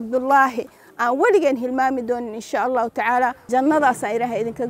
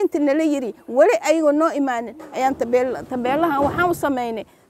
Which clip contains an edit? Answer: first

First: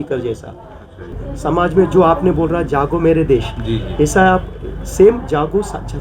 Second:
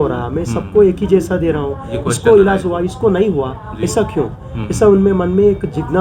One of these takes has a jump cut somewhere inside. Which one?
first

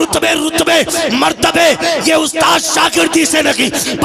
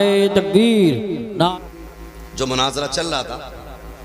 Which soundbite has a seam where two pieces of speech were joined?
second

